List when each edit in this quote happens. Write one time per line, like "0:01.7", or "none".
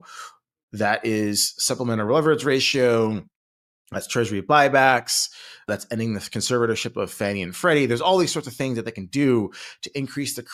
none